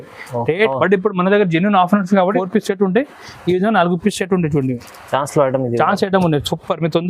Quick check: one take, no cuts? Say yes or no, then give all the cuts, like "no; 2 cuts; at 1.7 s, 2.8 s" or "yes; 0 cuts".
no; 2 cuts; at 0.7 s, 2.4 s